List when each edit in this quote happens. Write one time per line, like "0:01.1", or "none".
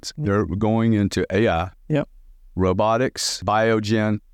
0:03.4